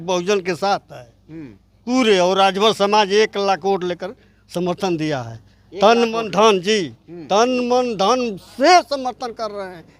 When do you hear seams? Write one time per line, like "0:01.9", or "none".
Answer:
none